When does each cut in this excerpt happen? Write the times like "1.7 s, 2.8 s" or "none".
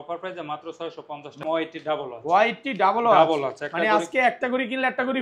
1.4 s